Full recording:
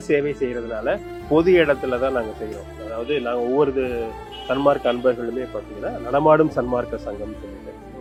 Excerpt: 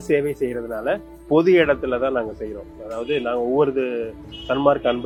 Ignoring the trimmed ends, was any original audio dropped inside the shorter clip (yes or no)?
no